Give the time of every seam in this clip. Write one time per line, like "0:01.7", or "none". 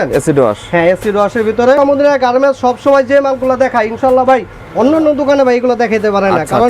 0:01.8